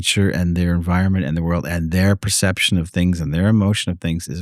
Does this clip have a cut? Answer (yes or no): no